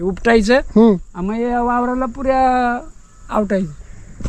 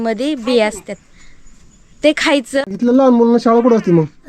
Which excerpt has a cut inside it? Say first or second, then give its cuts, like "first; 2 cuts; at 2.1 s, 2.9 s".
second; 1 cut; at 2.6 s